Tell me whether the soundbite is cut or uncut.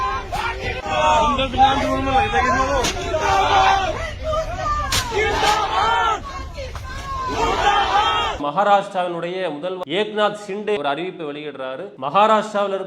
cut